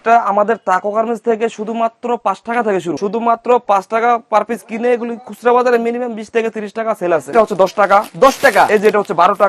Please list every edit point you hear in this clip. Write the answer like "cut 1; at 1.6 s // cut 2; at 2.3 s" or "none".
cut 1; at 2.9 s // cut 2; at 7.3 s